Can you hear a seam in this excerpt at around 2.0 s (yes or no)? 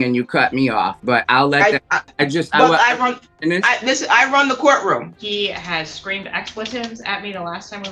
yes